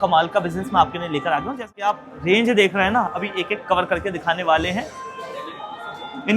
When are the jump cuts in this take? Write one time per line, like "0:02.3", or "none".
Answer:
0:01.7